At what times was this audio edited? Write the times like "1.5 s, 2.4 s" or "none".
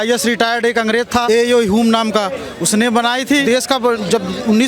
1.2 s, 3.4 s